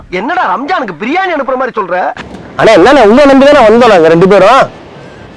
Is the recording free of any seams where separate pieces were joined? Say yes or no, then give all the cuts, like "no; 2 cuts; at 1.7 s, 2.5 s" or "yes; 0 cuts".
no; 1 cut; at 2.2 s